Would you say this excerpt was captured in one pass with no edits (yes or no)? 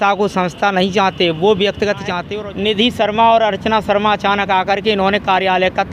no